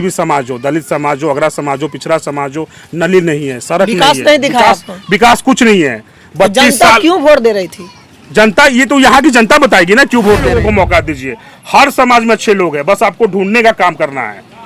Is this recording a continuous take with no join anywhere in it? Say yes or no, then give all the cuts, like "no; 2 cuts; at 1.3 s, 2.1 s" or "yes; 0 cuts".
no; 1 cut; at 10.5 s